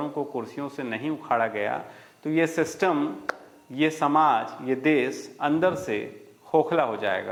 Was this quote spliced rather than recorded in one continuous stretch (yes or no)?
no